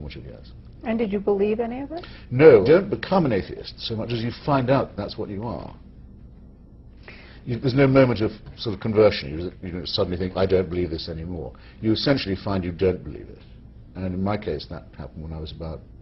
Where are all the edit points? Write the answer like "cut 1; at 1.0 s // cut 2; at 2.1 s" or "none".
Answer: cut 1; at 2.6 s